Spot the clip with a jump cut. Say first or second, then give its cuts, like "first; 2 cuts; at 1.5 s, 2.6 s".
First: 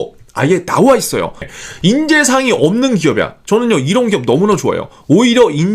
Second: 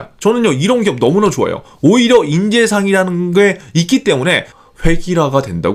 first; 1 cut; at 1.5 s